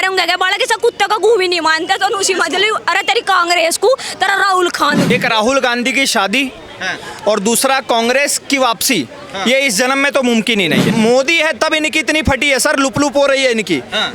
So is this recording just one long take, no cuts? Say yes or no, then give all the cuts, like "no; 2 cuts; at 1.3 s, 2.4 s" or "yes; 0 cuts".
no; 2 cuts; at 5.1 s, 10.9 s